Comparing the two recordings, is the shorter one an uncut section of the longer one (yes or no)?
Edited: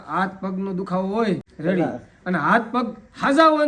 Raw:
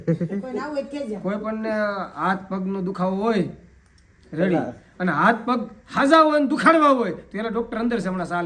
no